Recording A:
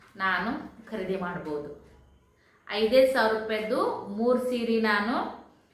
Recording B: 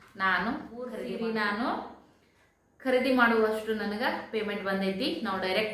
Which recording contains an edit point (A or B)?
B